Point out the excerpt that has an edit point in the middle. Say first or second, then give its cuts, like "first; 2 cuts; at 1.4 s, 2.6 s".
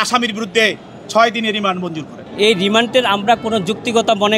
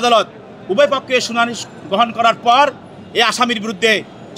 first; 1 cut; at 2.3 s